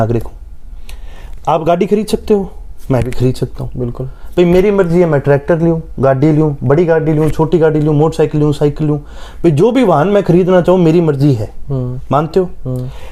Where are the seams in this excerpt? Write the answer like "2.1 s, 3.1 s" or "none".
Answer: none